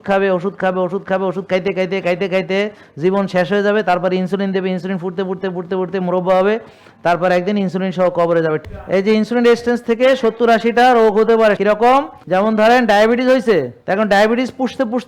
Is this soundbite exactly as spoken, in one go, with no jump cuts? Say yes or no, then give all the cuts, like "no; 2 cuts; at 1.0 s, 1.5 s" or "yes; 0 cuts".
no; 3 cuts; at 8.6 s, 11.8 s, 13.8 s